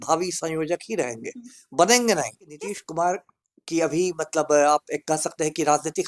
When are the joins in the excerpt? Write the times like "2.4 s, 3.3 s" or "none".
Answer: 2.5 s

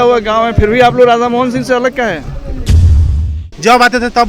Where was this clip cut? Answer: 2.9 s

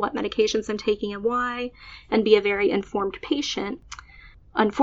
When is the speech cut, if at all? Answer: 3.8 s

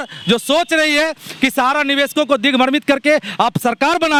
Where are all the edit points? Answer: none

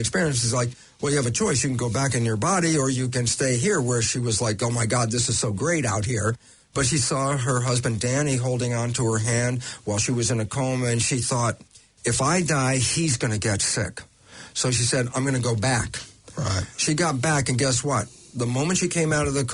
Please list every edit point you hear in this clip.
none

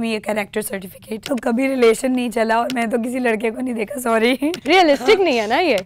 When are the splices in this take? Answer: 1.2 s, 4.6 s

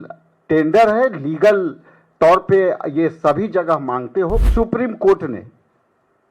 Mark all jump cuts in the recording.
4.5 s

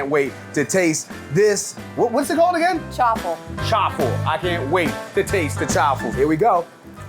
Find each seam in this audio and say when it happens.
6.1 s

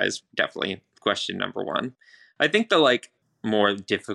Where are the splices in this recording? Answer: 3.1 s

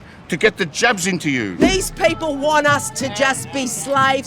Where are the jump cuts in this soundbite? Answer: 1.6 s

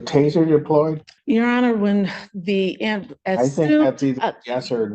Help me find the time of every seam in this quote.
1.1 s

